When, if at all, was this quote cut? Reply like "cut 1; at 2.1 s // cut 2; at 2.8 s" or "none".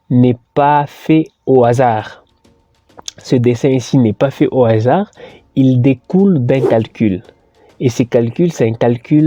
none